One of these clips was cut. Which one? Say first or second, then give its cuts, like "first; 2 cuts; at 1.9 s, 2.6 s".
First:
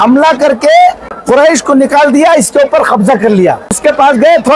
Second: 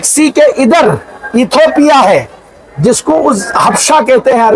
first; 2 cuts; at 1.1 s, 3.8 s